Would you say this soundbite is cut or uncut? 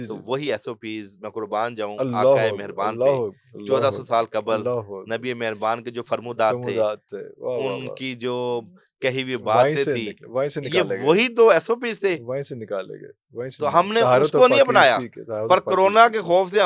uncut